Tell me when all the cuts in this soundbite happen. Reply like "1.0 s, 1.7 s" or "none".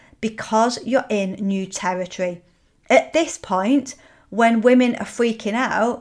none